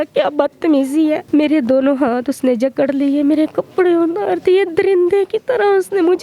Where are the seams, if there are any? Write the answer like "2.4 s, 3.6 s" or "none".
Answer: 1.2 s